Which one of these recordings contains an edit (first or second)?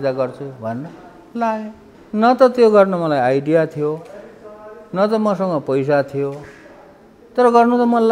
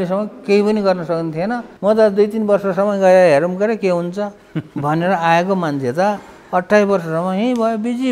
second